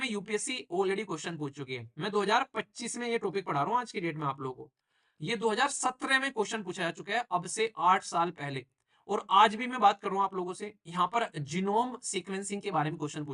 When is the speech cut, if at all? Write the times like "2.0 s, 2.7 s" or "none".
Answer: none